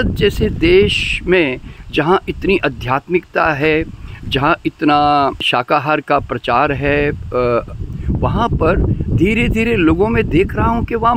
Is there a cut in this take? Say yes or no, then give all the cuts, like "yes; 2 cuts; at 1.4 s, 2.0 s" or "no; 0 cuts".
no; 0 cuts